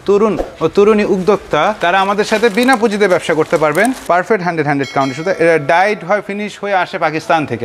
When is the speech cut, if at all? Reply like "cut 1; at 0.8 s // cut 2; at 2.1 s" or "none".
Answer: cut 1; at 4.0 s

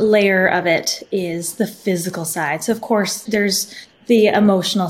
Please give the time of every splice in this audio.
cut 1; at 3.2 s

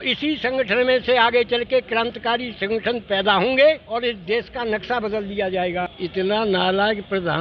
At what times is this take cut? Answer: cut 1; at 3.8 s // cut 2; at 5.9 s

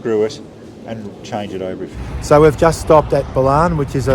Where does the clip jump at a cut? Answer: cut 1; at 1.9 s

